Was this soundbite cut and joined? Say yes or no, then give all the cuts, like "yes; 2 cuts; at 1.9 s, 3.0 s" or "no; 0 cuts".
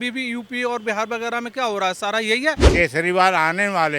yes; 1 cut; at 2.6 s